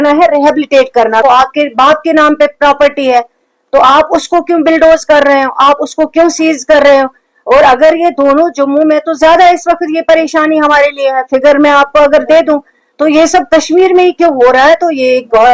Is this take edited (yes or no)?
yes